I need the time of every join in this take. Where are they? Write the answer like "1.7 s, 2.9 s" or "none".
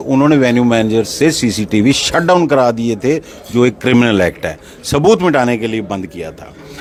none